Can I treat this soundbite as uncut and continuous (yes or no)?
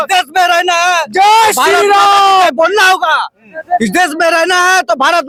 yes